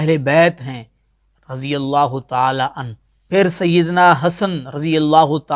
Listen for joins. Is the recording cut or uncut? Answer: cut